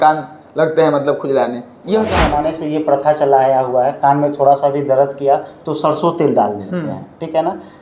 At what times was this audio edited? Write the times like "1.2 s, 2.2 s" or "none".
2.3 s